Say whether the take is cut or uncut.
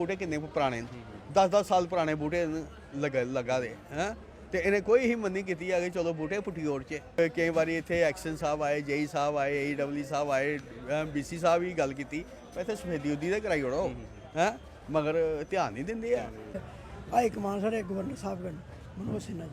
cut